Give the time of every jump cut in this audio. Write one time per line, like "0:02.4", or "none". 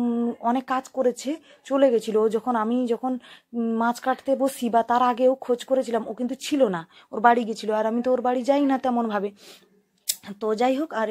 none